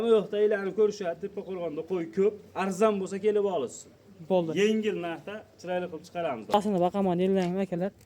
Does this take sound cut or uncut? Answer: cut